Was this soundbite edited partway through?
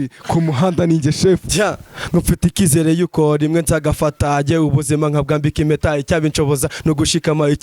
yes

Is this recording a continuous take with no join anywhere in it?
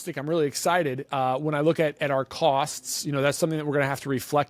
yes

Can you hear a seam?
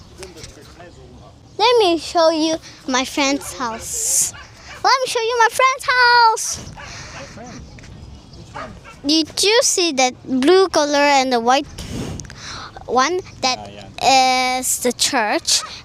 no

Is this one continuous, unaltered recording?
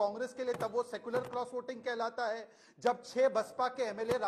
yes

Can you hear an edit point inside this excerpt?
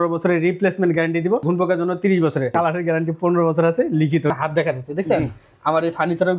yes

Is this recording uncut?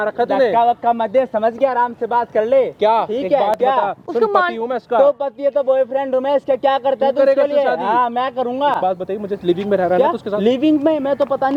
yes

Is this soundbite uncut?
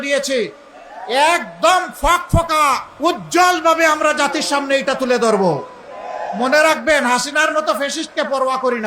no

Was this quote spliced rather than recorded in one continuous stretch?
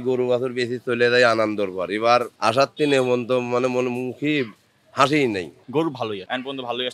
yes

